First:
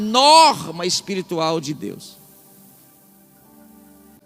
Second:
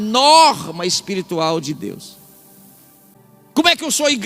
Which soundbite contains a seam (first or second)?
second